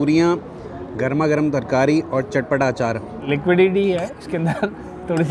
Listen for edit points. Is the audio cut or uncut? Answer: cut